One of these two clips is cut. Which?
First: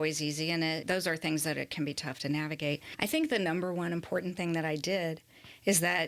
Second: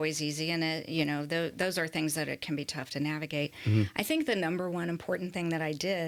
first; 2 cuts; at 0.8 s, 2.9 s

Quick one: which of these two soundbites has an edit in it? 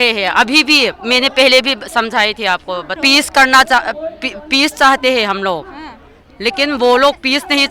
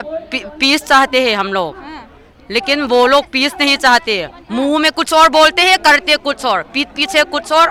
first; 1 cut; at 3.0 s

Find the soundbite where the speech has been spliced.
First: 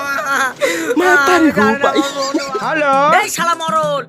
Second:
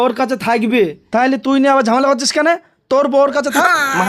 first; 1 cut; at 2.5 s

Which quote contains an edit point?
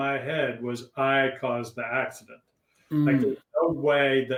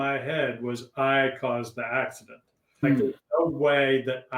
second; 1 cut; at 2.8 s

